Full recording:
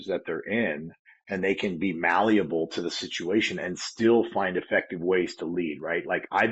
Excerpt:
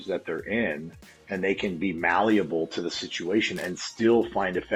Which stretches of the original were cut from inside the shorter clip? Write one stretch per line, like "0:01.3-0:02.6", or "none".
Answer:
none